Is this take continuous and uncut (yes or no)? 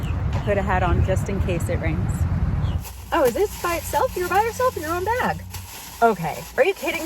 no